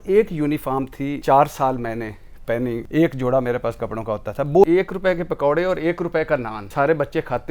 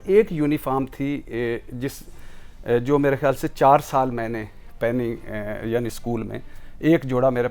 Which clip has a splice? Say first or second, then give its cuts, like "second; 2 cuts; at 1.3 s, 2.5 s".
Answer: first; 4 cuts; at 1.2 s, 2.8 s, 4.6 s, 6.6 s